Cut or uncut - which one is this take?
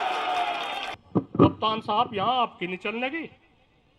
cut